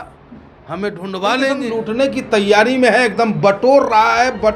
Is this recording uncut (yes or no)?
no